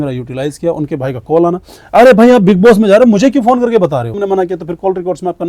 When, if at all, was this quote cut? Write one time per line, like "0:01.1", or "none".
0:04.1